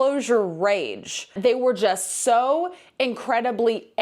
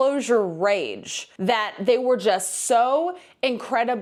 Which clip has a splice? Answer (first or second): first